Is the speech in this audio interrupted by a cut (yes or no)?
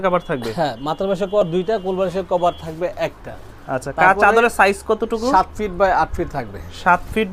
no